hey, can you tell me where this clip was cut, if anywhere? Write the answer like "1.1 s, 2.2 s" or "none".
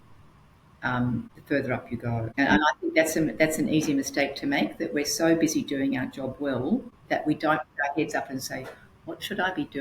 1.4 s, 2.4 s, 7.3 s